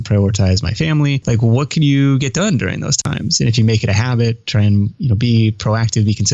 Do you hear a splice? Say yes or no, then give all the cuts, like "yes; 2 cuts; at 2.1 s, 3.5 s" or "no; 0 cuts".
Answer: yes; 1 cut; at 1.2 s